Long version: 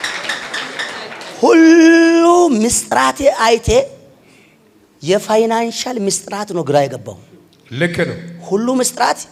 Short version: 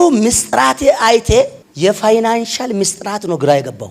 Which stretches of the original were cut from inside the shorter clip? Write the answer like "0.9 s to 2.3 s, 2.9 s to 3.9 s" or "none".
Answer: 4.0 s to 4.9 s